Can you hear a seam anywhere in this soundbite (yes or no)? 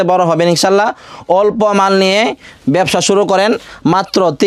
no